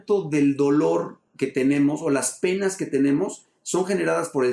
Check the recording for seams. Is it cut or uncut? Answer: cut